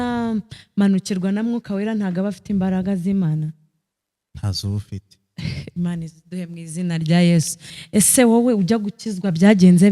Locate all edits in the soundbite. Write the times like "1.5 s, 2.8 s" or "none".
7.7 s